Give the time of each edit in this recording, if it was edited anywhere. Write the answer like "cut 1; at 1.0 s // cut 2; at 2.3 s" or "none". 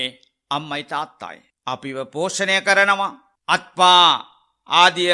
cut 1; at 1.5 s // cut 2; at 3.3 s